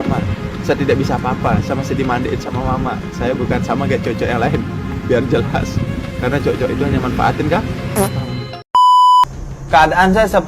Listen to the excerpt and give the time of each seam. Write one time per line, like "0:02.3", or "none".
0:08.6
0:09.2

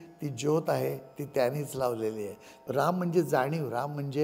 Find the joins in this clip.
0:02.6

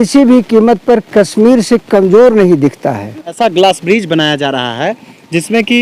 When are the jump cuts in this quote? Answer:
0:03.4

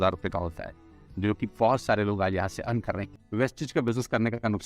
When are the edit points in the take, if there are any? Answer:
0:03.0

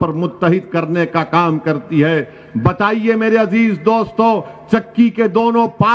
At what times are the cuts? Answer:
none

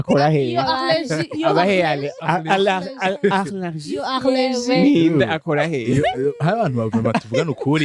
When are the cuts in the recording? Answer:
none

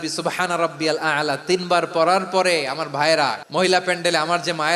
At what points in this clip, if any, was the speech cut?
0:03.4

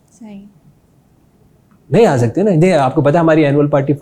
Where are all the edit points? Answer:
none

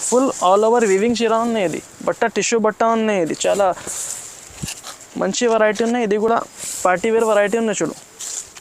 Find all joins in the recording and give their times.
none

